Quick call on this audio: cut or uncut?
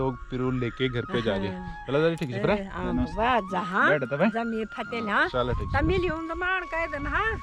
uncut